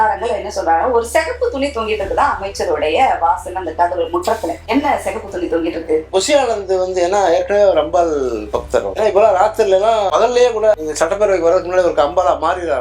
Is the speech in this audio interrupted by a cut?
yes; 3 cuts; at 4.6 s, 6.1 s, 8.9 s

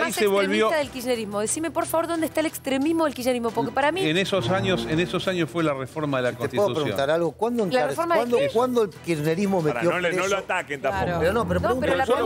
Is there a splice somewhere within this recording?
no; 0 cuts

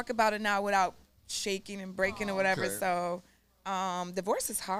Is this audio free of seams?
yes; 0 cuts

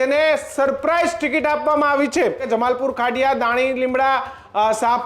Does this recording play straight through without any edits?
no; 1 cut; at 2.4 s

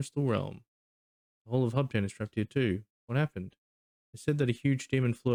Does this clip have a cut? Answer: no; 0 cuts

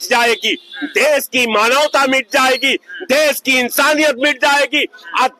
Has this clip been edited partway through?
no; 0 cuts

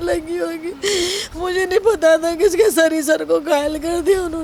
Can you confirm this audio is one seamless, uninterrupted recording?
yes; 0 cuts

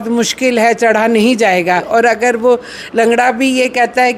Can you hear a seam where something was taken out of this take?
yes; 1 cut; at 1.9 s

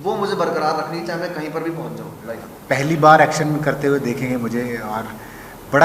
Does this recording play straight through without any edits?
no; 1 cut; at 2.5 s

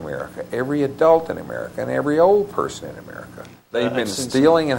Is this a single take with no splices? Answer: no; 1 cut; at 3.7 s

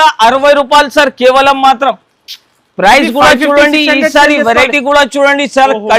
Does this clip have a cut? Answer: no; 0 cuts

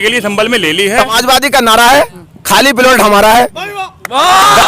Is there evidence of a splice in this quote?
yes; 1 cut; at 1.0 s

